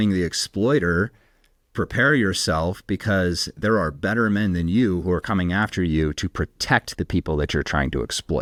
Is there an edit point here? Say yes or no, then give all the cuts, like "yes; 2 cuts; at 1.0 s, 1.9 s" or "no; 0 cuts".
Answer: no; 0 cuts